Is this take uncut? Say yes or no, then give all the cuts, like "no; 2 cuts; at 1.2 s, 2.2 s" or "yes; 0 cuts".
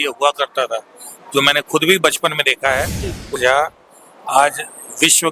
no; 1 cut; at 3.4 s